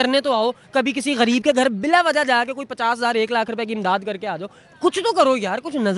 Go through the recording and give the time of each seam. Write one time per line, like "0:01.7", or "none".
none